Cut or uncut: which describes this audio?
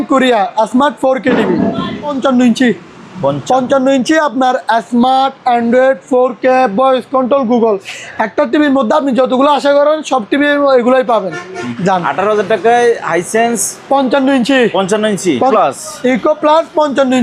cut